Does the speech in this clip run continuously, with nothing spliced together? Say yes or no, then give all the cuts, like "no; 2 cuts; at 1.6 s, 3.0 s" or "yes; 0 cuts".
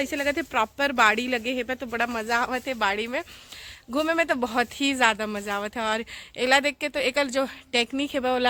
yes; 0 cuts